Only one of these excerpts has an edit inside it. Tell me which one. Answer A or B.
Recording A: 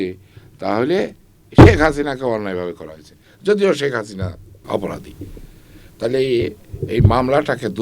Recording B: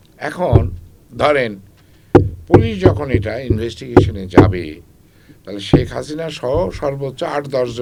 A